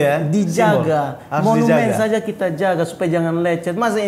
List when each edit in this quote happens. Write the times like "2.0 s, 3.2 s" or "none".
none